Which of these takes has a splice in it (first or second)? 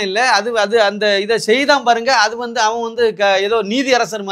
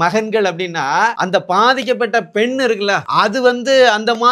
second